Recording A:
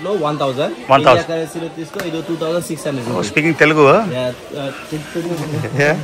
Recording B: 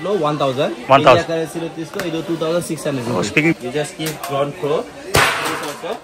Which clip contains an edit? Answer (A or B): B